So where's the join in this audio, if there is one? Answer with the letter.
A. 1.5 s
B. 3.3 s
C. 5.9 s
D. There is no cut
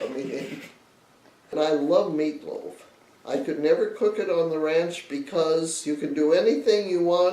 A